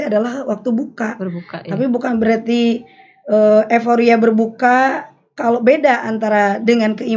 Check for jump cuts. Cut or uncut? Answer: uncut